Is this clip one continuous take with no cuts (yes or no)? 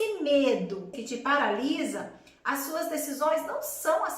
no